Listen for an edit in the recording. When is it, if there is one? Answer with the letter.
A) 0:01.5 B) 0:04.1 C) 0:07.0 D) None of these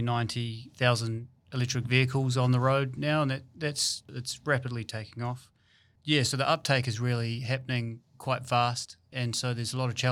B